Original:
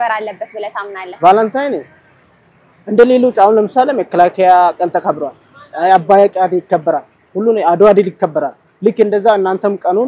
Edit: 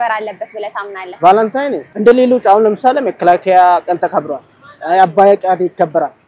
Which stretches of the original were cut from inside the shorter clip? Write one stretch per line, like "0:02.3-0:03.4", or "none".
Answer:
0:01.9-0:02.8